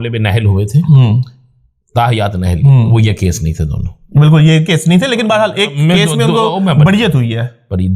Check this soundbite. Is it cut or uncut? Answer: uncut